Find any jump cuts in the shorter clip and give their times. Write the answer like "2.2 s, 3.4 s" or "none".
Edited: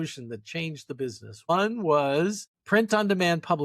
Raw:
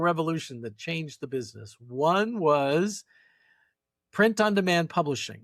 1.5 s, 2.5 s

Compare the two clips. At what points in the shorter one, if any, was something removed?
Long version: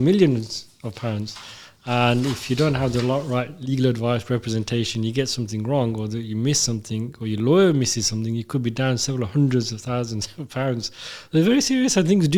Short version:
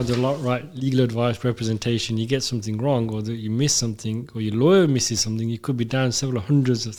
none

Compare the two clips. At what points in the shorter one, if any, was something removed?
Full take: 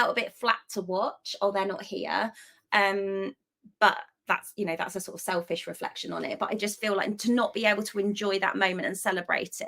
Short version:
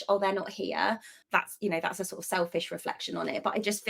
1.1 s

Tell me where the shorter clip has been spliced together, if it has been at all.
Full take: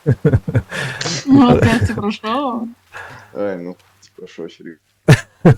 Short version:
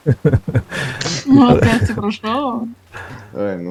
none

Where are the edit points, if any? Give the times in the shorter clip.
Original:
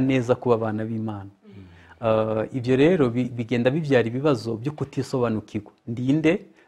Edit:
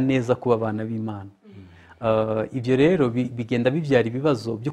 none

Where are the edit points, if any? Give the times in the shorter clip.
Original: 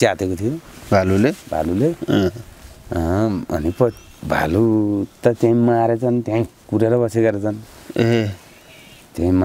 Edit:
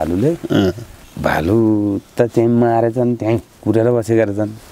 1.0 s

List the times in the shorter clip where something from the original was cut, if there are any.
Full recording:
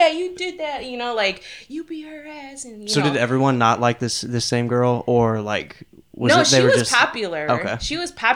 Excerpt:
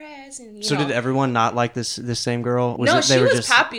2.7 s

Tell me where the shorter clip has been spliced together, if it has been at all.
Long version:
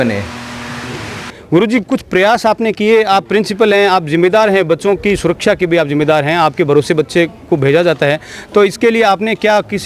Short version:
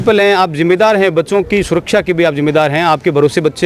none

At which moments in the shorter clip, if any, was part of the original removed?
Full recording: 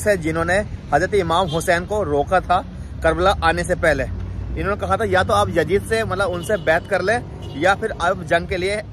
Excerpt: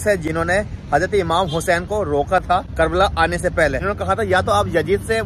2.7 s, 3.8 s

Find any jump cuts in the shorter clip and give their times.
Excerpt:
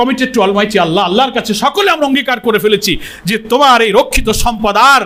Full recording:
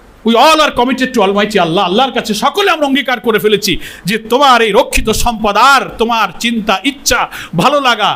none

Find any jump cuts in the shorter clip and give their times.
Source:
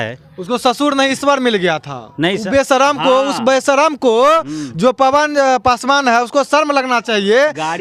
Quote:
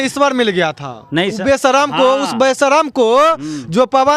none

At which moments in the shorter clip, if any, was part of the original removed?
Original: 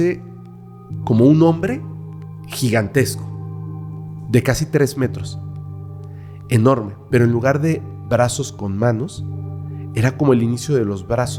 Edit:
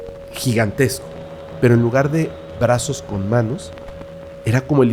1.4 s

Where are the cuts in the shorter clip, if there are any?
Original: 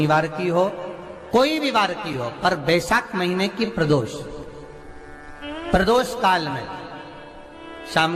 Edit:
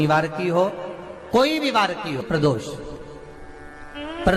2.2 s

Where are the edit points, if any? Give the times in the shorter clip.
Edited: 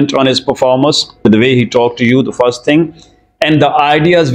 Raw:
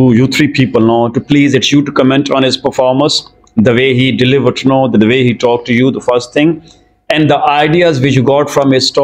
1.2 s

